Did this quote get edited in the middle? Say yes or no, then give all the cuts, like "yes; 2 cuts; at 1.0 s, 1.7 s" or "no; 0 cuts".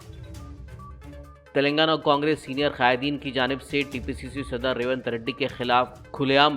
no; 0 cuts